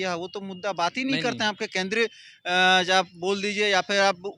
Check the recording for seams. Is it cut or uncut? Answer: uncut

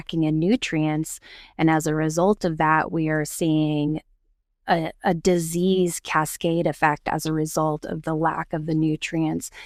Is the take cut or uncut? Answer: uncut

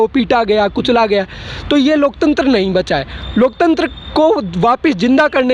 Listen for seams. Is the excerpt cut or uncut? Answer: uncut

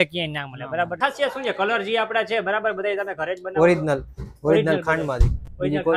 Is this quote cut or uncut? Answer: cut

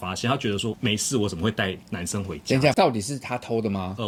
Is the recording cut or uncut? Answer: uncut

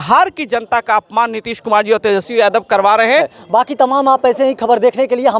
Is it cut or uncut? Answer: uncut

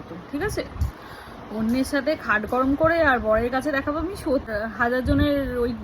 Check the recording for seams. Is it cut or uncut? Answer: cut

